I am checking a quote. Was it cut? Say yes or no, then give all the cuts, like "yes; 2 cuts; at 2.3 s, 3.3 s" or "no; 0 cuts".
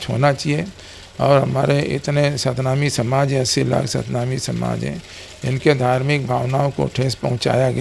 no; 0 cuts